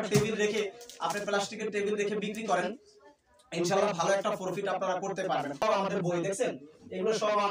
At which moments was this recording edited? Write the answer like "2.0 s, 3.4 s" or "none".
5.6 s